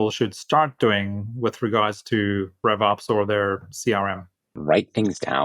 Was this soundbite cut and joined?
yes; 2 cuts; at 2.5 s, 4.5 s

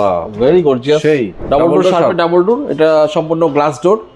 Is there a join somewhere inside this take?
yes; 1 cut; at 1.4 s

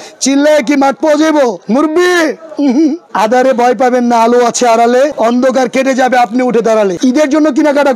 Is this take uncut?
no; 2 cuts; at 3.1 s, 7.0 s

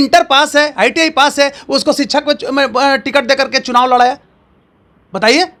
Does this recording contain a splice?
no; 0 cuts

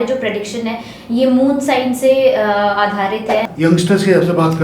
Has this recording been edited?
yes; 1 cut; at 3.5 s

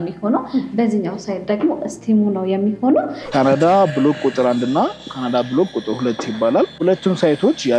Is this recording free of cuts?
no; 2 cuts; at 3.2 s, 6.7 s

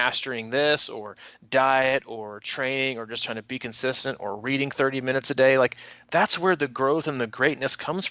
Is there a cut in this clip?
no; 0 cuts

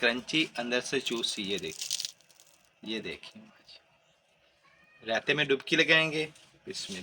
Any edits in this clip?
no; 0 cuts

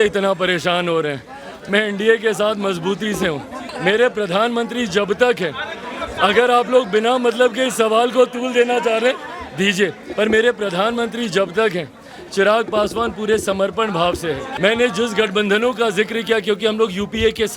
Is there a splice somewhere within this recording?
yes; 3 cuts; at 3.6 s, 10.0 s, 14.5 s

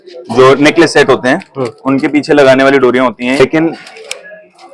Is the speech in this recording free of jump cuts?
no; 1 cut; at 3.4 s

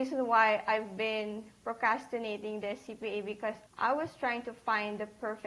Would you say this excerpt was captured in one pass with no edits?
no; 1 cut; at 3.6 s

